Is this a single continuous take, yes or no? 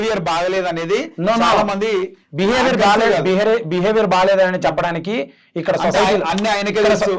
yes